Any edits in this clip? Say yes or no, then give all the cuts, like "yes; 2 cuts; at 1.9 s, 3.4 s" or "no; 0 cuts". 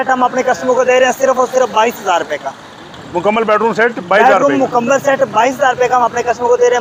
no; 0 cuts